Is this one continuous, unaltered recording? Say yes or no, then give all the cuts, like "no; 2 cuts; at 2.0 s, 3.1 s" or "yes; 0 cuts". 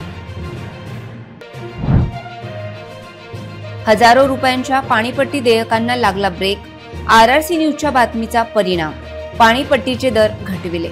no; 1 cut; at 0.9 s